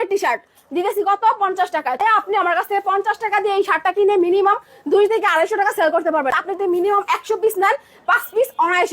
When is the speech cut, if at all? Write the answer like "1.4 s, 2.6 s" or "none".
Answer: 2.0 s, 6.3 s